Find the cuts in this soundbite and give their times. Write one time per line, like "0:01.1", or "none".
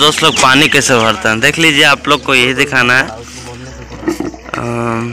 none